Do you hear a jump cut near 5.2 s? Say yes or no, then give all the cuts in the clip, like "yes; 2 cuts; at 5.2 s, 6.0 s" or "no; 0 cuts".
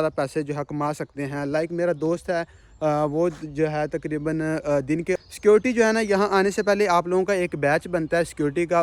yes; 1 cut; at 5.2 s